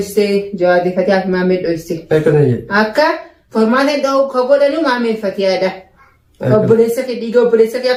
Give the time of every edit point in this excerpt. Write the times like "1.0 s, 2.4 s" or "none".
none